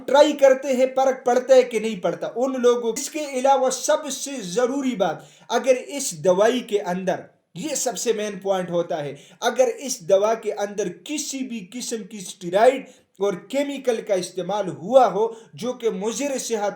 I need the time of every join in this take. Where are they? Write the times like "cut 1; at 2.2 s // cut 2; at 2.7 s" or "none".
cut 1; at 3.0 s